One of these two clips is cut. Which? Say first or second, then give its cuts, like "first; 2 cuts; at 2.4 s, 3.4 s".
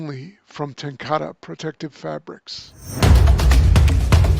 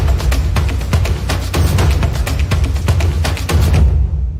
first; 1 cut; at 2.4 s